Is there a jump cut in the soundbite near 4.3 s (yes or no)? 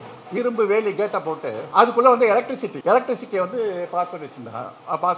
no